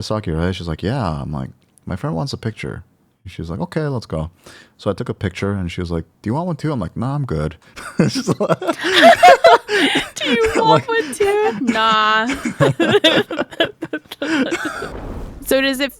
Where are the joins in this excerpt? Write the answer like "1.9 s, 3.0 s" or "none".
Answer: 14.8 s